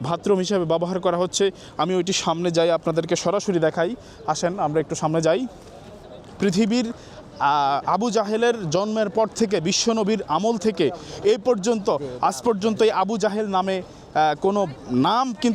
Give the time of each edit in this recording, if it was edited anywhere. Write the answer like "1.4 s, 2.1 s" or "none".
none